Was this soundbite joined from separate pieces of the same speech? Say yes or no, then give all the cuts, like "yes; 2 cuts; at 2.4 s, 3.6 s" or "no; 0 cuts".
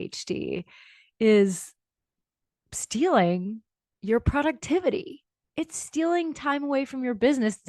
no; 0 cuts